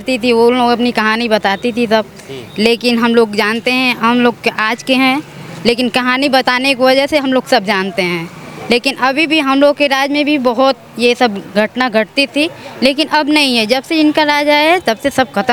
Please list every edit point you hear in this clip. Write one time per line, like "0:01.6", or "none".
none

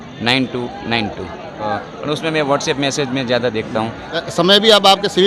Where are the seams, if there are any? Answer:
0:01.7
0:04.3

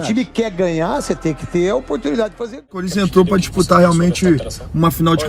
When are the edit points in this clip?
0:02.8

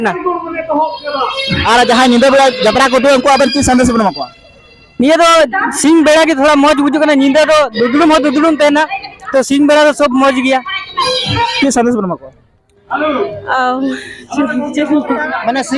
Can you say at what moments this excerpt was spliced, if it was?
0:11.5

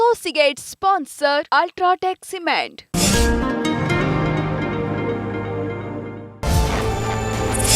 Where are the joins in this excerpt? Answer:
none

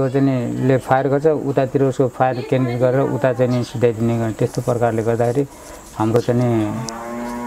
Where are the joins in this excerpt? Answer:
none

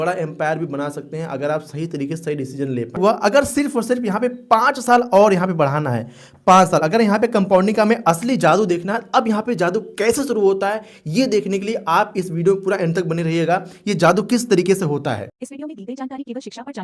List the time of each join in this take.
0:03.0
0:15.3

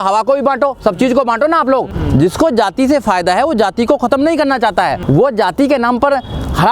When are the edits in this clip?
0:02.0
0:05.0

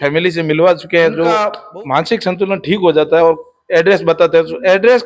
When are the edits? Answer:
0:01.5

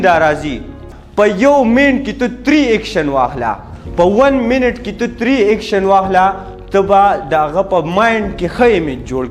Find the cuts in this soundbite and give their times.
0:00.9

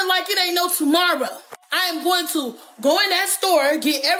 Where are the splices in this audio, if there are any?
none

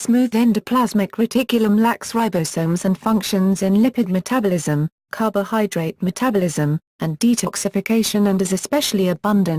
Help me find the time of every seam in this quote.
0:06.5

